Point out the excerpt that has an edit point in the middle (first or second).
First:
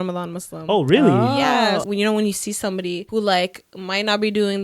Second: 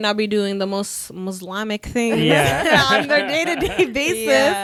first